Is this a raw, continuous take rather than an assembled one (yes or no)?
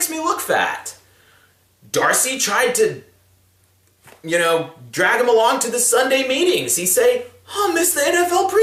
yes